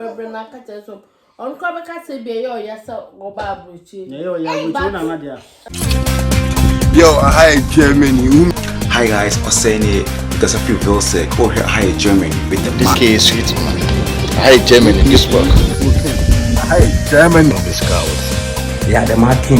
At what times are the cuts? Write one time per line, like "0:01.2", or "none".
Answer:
0:05.8